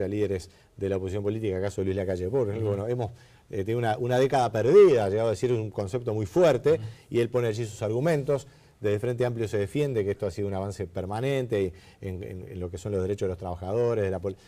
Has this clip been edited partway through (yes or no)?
no